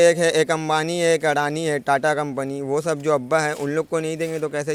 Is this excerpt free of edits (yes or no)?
yes